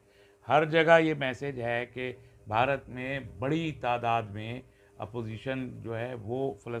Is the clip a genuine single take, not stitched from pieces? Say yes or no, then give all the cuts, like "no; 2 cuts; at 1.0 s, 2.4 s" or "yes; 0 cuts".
yes; 0 cuts